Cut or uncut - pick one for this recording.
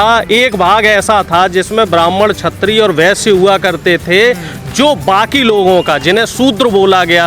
uncut